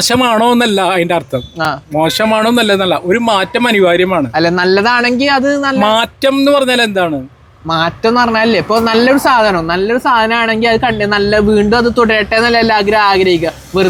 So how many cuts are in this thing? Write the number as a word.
zero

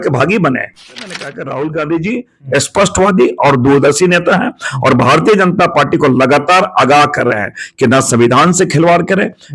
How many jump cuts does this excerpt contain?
one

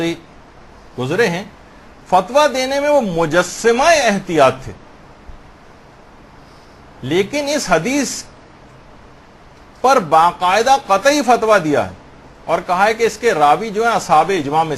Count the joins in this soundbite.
one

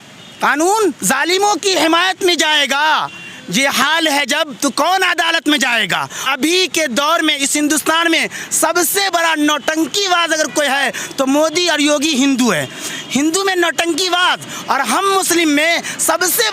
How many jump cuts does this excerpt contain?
one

